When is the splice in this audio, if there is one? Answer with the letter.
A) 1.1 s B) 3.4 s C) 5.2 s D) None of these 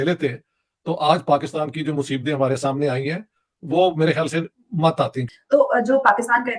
C